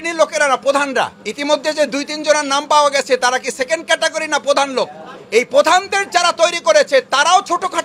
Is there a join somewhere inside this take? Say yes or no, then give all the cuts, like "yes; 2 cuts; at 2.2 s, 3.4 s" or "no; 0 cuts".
yes; 1 cut; at 1.2 s